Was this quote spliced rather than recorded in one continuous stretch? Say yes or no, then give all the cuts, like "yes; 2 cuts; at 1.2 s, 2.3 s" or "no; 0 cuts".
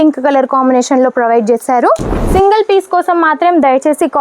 yes; 1 cut; at 2.1 s